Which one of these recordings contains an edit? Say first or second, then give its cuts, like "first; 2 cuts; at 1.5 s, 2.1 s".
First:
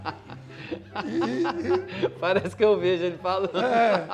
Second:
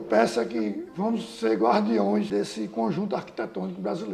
second; 1 cut; at 2.3 s